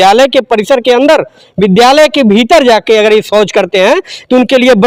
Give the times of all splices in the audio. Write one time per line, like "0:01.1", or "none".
none